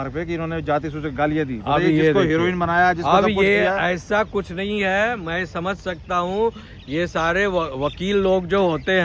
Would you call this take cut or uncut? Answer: uncut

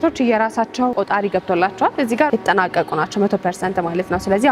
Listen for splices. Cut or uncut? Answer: cut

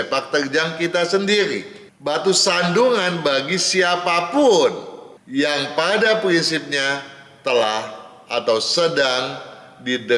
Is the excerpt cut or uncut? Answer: uncut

